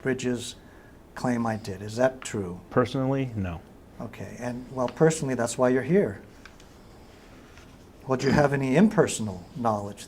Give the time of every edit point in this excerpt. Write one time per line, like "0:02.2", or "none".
none